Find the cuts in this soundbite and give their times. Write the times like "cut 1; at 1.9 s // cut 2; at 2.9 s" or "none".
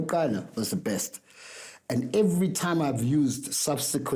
none